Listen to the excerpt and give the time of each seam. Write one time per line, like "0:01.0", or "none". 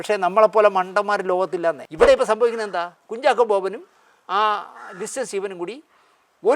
0:01.9